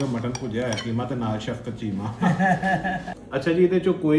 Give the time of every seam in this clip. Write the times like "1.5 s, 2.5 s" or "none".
3.1 s